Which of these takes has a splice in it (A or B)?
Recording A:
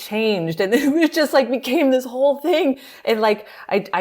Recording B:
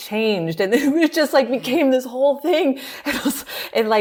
A